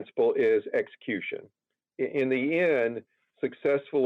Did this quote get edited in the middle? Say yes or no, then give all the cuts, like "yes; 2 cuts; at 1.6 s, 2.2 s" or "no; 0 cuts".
no; 0 cuts